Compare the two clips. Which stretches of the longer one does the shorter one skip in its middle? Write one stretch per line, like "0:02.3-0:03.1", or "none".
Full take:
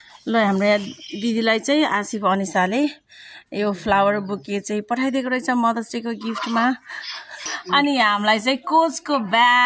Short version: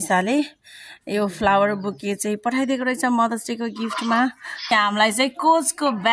0:07.2-0:08.0